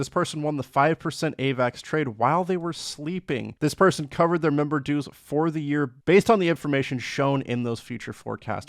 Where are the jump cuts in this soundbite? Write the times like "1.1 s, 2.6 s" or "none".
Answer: 3.5 s